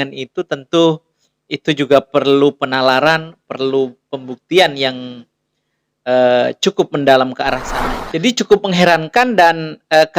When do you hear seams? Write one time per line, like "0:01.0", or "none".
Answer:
0:07.7